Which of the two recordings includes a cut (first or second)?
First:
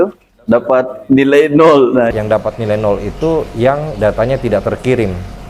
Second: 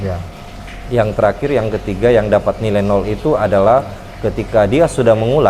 first